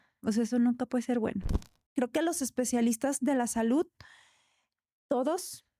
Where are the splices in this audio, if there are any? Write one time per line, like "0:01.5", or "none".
0:01.8